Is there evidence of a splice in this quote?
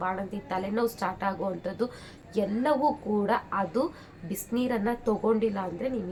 no; 0 cuts

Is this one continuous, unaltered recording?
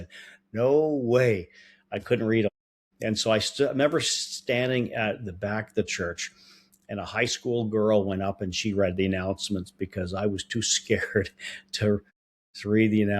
yes; 0 cuts

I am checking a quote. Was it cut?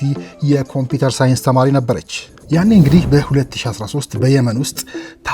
yes; 1 cut; at 2.3 s

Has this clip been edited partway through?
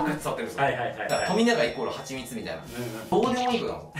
yes; 1 cut; at 3.0 s

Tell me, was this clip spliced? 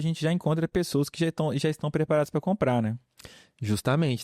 no; 0 cuts

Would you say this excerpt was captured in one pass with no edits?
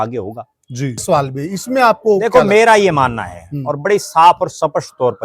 no; 1 cut; at 1.0 s

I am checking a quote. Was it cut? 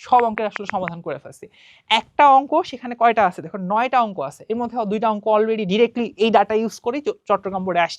no; 0 cuts

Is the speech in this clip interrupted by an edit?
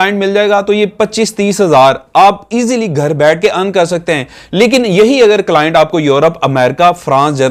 no; 0 cuts

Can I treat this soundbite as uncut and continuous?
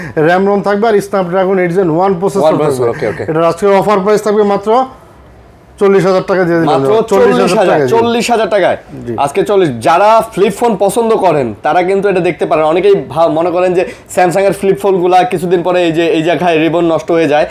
yes; 0 cuts

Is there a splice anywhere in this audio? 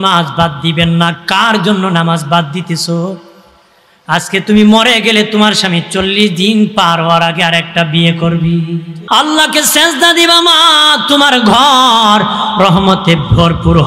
yes; 1 cut; at 8.9 s

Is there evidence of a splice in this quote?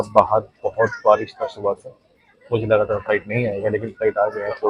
no; 0 cuts

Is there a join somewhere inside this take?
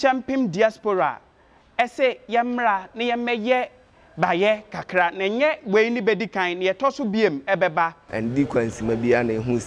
yes; 1 cut; at 8.0 s

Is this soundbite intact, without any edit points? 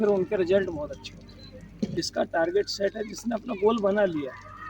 no; 1 cut; at 2.0 s

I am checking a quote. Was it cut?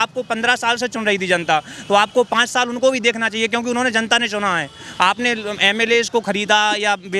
no; 0 cuts

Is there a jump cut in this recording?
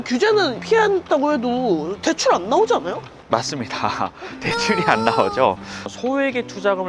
yes; 1 cut; at 5.9 s

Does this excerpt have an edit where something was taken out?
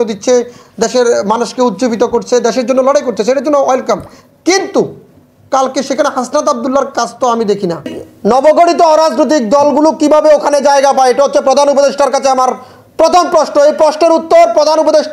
yes; 1 cut; at 8.0 s

